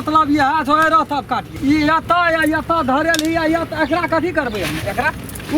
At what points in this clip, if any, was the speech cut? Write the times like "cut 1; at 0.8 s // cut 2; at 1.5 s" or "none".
cut 1; at 1.5 s